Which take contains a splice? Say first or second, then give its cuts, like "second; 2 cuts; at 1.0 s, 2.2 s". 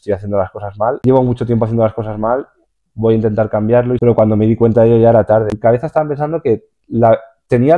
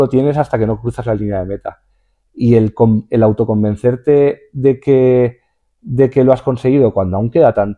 first; 3 cuts; at 1.0 s, 4.0 s, 5.5 s